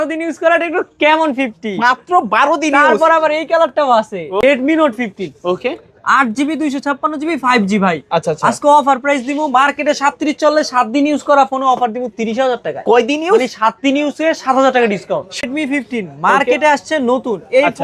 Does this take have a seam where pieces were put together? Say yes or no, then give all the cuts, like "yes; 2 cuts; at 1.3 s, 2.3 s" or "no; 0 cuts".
yes; 2 cuts; at 4.4 s, 15.5 s